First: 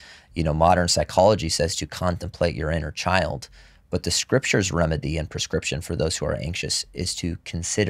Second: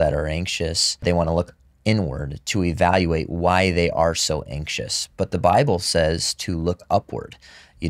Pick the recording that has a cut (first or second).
second